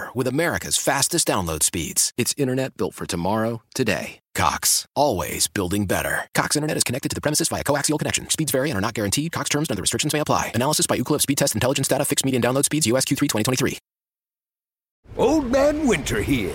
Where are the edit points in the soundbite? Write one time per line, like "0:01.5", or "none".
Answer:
0:15.0

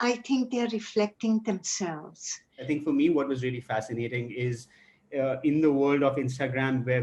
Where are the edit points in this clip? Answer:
0:02.5

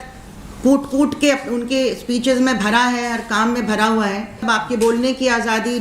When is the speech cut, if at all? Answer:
0:04.4

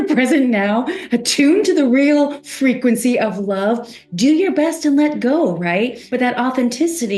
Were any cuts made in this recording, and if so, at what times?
0:06.0

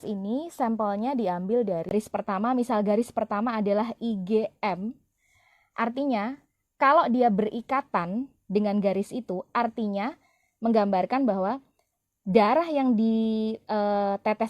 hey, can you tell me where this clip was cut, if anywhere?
0:01.9

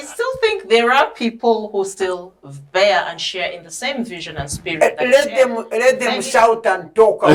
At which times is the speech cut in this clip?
none

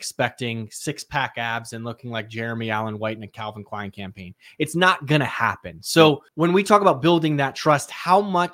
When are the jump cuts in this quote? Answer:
0:06.3

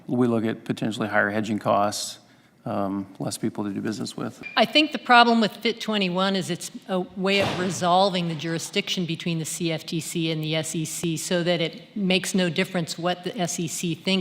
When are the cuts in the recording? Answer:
0:04.4

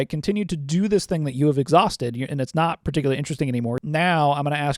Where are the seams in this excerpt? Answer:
0:03.8

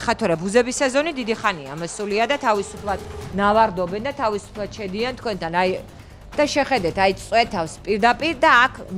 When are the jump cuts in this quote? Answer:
none

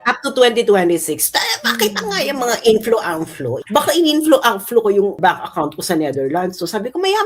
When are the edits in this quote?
0:03.5
0:05.1

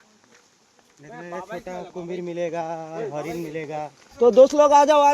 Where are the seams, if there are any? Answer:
0:04.0

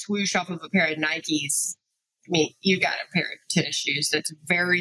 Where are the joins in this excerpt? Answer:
none

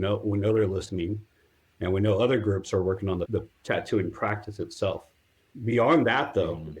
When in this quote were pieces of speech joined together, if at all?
0:03.3

